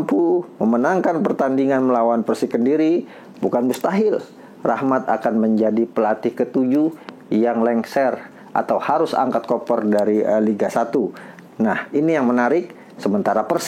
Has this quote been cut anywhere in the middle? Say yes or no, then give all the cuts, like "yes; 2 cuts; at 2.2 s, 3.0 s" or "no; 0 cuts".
no; 0 cuts